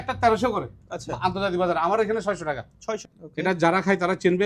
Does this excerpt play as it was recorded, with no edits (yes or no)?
no